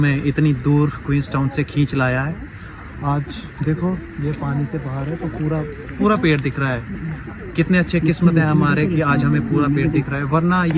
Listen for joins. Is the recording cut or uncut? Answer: uncut